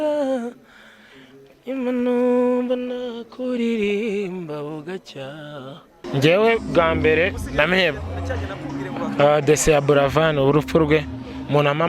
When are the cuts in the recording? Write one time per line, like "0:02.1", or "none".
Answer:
0:06.0